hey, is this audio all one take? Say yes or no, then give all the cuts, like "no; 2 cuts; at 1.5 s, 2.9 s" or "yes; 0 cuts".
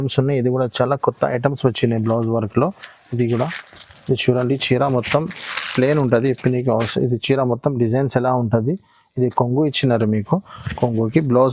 yes; 0 cuts